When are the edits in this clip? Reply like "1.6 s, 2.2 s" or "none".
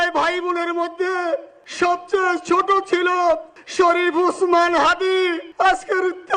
1.6 s, 3.6 s, 5.4 s